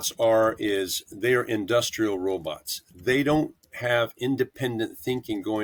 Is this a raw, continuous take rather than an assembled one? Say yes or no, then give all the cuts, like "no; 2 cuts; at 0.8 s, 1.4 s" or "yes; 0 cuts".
yes; 0 cuts